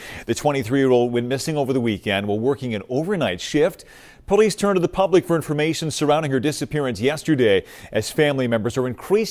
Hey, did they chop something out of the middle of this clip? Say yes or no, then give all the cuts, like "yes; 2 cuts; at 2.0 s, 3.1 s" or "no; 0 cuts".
no; 0 cuts